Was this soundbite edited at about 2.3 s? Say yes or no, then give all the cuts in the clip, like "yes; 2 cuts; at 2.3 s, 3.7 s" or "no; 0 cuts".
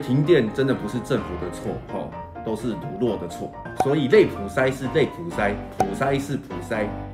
no; 1 cut; at 3.7 s